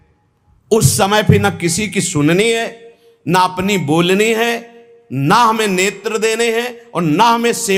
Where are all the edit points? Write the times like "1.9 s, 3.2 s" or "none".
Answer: none